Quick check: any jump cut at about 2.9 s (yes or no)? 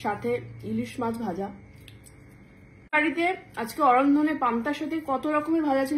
yes